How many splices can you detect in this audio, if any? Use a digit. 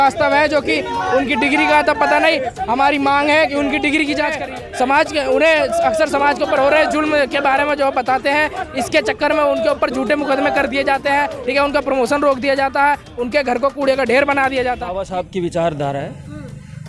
2